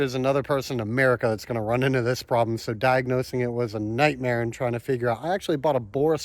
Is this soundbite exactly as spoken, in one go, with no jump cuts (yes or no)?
yes